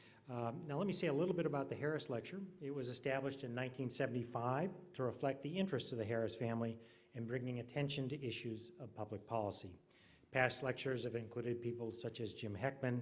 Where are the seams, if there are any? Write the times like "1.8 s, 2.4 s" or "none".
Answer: 10.6 s